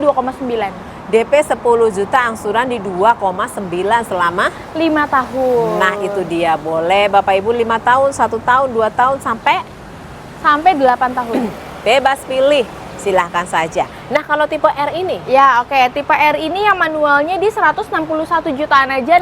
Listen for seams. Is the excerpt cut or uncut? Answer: uncut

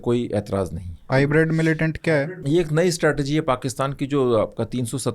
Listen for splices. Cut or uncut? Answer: cut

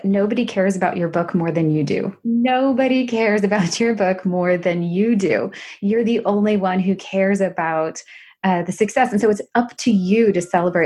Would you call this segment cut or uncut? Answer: cut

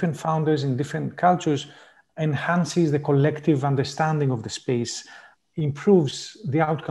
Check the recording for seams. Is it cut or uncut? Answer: uncut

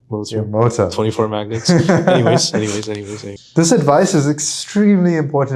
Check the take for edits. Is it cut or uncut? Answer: cut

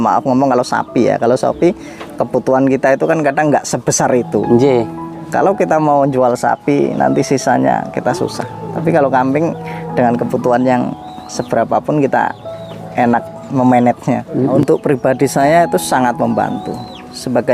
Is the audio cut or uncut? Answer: cut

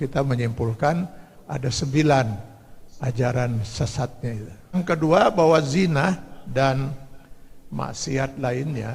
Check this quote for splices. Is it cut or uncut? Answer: cut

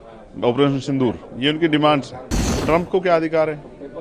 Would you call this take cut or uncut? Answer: cut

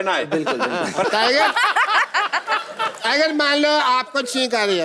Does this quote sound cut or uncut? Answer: cut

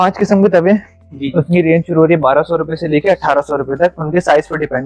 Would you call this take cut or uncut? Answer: uncut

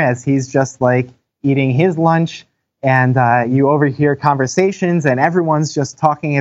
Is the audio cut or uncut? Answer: uncut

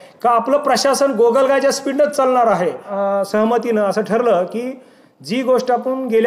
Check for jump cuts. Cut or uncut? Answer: cut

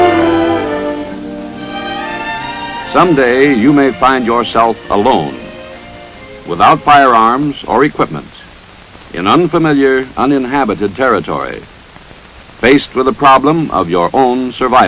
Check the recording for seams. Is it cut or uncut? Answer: uncut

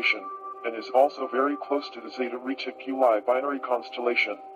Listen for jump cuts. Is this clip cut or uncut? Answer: cut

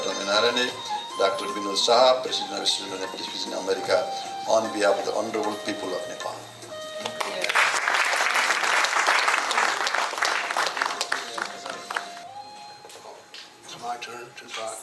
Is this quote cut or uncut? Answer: cut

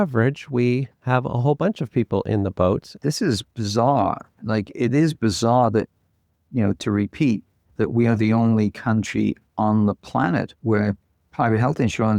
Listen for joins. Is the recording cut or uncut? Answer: cut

